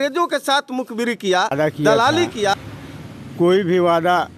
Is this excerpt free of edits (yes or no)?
no